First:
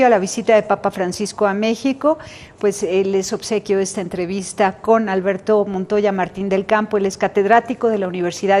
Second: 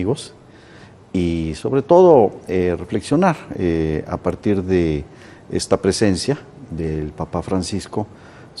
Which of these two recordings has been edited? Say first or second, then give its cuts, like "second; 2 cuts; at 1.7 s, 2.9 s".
first; 1 cut; at 2.9 s